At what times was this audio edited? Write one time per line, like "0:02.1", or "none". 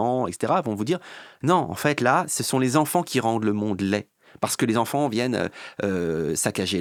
none